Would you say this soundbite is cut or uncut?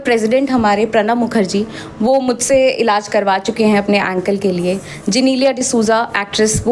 uncut